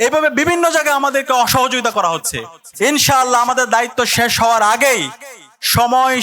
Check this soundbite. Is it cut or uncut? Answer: cut